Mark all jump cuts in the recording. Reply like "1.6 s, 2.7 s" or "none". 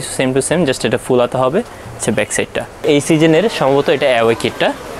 2.8 s